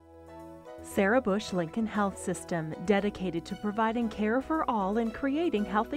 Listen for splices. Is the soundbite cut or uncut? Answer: cut